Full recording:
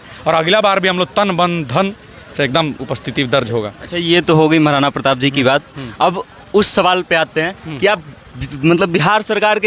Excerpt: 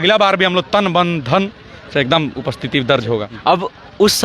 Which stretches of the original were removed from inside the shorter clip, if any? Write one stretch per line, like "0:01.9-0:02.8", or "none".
0:03.8-0:05.9